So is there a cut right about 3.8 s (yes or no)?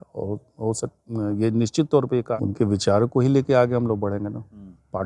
no